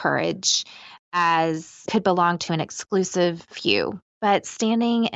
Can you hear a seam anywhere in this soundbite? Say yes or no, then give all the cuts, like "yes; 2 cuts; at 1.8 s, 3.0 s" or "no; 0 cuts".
yes; 1 cut; at 4.0 s